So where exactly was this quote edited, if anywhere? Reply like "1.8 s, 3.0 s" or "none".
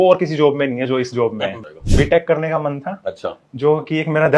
1.8 s